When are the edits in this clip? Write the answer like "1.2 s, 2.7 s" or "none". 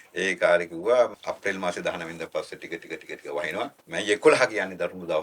1.1 s, 3.8 s